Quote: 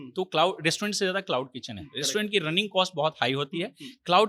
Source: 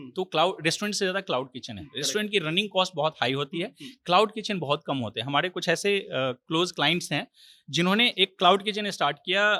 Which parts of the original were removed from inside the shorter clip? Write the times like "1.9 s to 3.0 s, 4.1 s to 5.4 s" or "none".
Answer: none